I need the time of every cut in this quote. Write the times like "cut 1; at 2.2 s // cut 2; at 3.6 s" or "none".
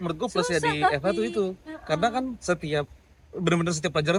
none